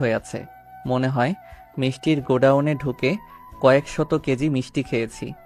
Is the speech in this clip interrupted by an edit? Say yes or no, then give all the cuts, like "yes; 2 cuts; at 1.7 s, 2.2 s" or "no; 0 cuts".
no; 0 cuts